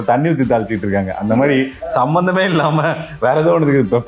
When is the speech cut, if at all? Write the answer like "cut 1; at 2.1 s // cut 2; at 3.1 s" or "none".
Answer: none